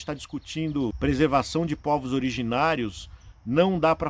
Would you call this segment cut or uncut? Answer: cut